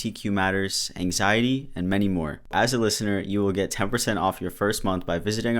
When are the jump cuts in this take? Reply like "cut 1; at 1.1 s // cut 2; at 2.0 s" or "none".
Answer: cut 1; at 2.5 s